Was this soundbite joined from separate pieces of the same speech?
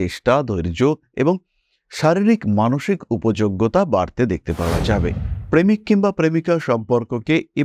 yes; 1 cut; at 5.3 s

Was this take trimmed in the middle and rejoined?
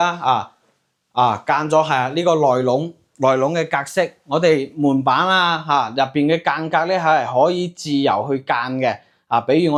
no; 0 cuts

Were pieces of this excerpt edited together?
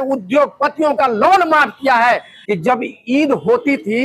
yes; 1 cut; at 2.3 s

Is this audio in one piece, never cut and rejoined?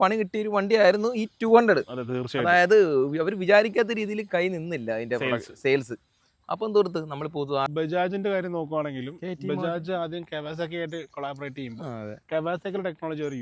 no; 1 cut; at 7.7 s

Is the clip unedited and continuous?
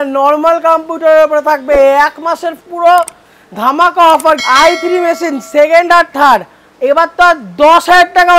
no; 1 cut; at 4.4 s

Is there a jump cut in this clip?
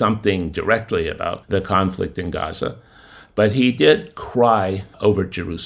no; 0 cuts

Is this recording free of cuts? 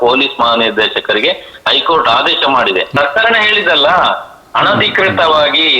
no; 1 cut; at 2.9 s

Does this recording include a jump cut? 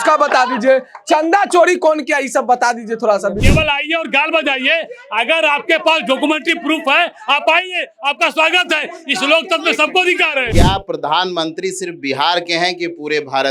yes; 2 cuts; at 3.4 s, 10.5 s

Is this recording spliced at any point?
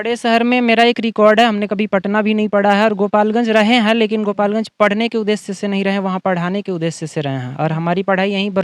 no; 0 cuts

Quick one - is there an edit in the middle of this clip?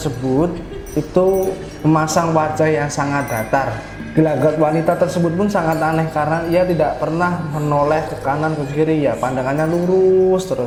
no; 0 cuts

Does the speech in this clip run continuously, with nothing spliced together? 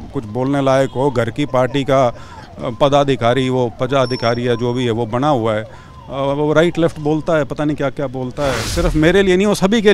no; 1 cut; at 8.7 s

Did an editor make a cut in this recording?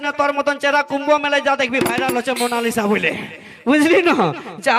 no; 0 cuts

